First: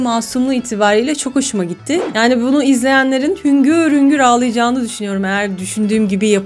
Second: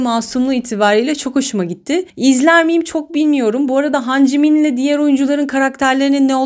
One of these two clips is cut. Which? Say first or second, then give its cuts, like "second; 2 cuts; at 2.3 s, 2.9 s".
first; 1 cut; at 2.1 s